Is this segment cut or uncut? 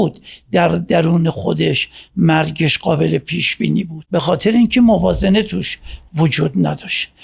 cut